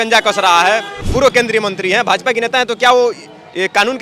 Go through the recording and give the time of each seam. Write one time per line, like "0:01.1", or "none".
0:01.0